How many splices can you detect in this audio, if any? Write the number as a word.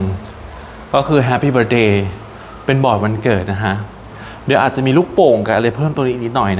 zero